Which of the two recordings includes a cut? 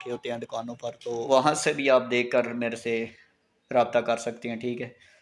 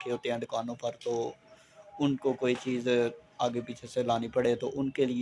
first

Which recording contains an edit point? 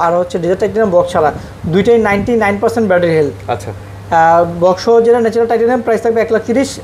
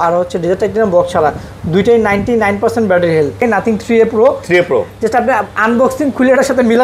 second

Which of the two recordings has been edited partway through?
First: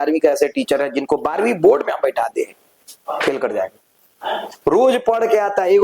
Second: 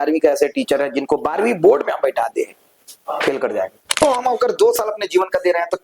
second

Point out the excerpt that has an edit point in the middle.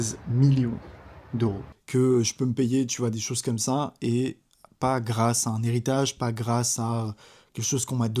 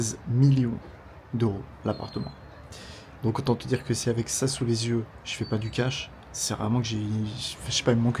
first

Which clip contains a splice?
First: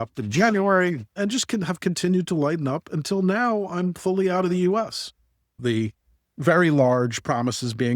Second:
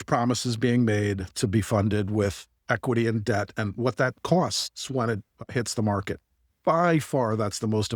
first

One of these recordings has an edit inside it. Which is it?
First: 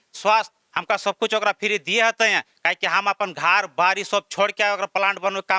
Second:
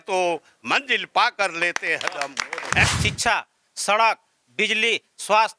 second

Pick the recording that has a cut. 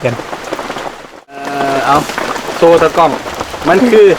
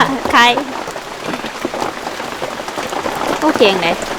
first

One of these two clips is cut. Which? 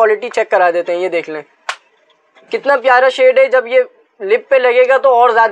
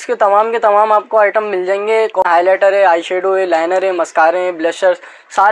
second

